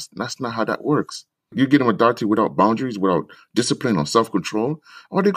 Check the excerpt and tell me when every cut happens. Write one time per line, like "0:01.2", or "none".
0:01.5

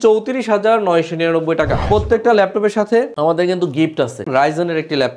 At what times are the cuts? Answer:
0:01.8
0:04.3

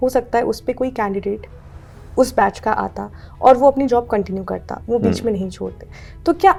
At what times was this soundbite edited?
none

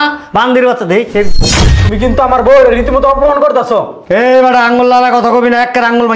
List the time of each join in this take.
0:01.6

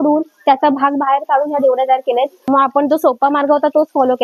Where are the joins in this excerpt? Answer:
0:02.5

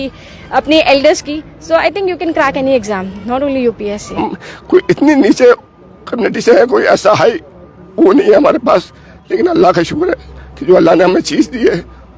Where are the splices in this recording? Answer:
0:04.2

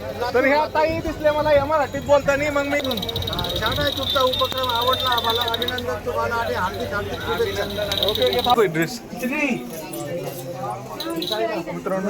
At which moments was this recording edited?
0:02.8
0:08.5

